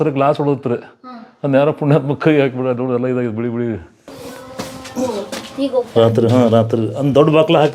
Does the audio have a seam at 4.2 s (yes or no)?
yes